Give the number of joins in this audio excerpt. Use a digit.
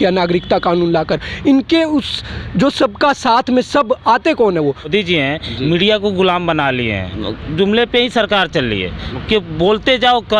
2